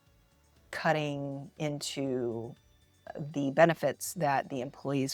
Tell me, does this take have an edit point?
no; 0 cuts

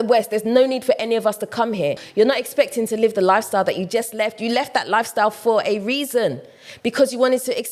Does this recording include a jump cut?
yes; 1 cut; at 2.0 s

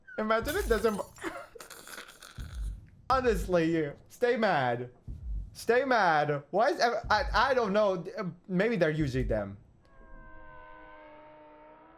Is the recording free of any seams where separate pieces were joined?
no; 1 cut; at 3.1 s

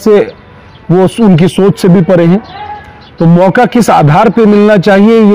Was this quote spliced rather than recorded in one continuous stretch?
no; 0 cuts

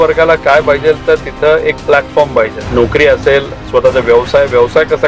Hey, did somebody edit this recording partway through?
yes; 1 cut; at 2.6 s

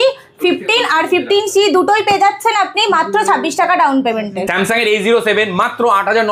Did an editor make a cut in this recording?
no; 0 cuts

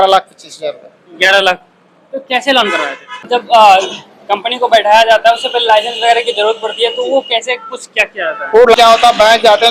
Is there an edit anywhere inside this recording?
yes; 2 cuts; at 3.3 s, 8.7 s

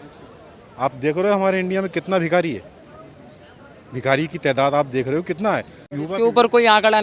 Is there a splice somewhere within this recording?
yes; 1 cut; at 5.9 s

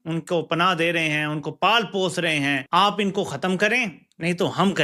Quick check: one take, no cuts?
no; 1 cut; at 2.6 s

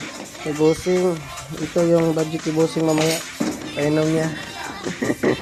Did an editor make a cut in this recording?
no; 0 cuts

